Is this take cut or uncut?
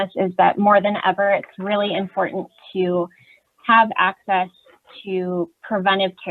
uncut